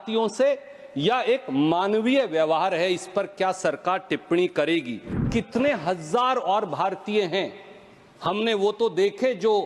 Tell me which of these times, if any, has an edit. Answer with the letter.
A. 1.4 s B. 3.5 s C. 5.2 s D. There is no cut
C